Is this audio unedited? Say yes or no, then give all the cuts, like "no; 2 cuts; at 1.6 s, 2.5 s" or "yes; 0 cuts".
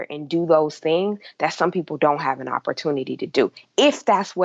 yes; 0 cuts